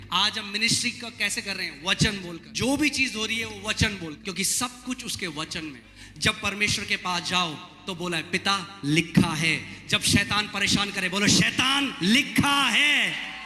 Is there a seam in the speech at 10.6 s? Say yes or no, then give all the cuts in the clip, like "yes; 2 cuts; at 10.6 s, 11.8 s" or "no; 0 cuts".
no; 3 cuts; at 2.4 s, 4.2 s, 5.9 s